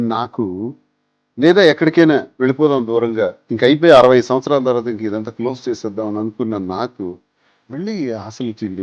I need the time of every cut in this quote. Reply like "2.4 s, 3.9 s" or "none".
none